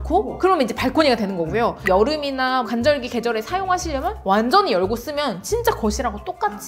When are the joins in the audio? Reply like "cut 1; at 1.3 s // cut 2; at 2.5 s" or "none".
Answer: none